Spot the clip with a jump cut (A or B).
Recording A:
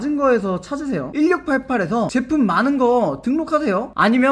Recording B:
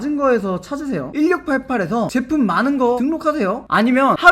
B